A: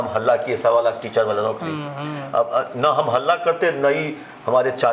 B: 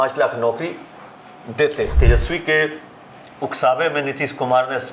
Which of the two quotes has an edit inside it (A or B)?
B